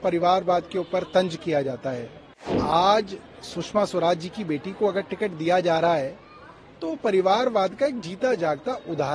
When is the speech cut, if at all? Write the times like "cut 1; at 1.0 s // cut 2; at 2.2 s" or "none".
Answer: cut 1; at 2.6 s